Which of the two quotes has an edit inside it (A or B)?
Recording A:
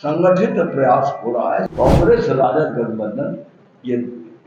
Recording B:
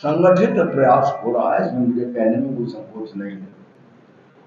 A